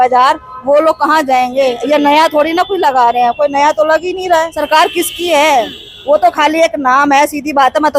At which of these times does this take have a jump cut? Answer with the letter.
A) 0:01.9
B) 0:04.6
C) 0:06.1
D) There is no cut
B